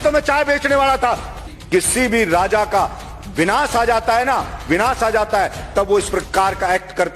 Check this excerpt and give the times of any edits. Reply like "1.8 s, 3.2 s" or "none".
1.5 s